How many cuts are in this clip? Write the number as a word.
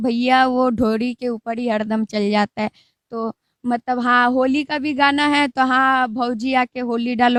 zero